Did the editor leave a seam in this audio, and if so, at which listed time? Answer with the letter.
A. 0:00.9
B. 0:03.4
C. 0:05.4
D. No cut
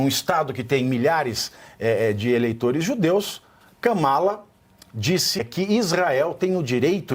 C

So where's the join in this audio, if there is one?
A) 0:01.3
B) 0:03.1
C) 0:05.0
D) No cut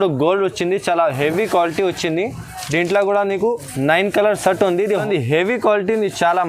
C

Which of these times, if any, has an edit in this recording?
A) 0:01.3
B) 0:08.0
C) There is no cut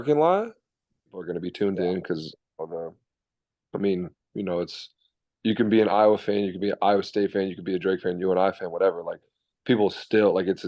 A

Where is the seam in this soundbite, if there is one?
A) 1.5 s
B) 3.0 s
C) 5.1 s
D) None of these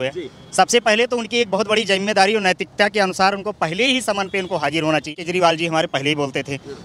C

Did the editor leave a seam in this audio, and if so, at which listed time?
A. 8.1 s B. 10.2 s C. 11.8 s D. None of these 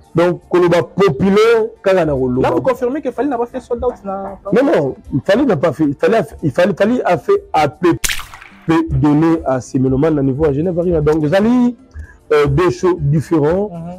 A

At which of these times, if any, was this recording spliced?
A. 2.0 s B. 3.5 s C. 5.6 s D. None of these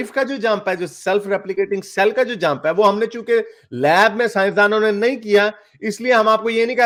D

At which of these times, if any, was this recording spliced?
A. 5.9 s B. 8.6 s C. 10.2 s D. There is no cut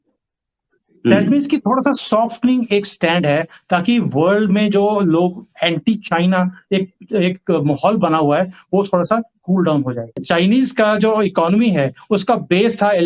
C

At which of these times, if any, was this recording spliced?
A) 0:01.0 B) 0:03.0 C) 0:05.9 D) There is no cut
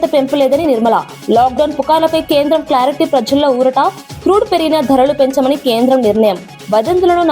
D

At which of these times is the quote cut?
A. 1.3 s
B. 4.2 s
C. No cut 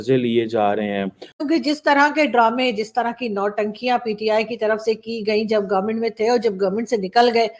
A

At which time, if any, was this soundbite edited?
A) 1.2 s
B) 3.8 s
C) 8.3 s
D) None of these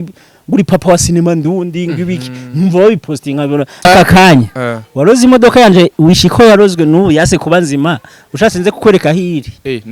B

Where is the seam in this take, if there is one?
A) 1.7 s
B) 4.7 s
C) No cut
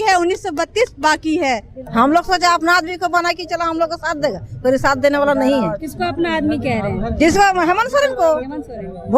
A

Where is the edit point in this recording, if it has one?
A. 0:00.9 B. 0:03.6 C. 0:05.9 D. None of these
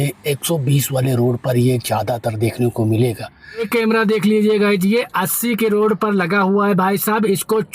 B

